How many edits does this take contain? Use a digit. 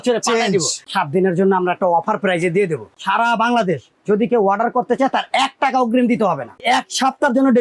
3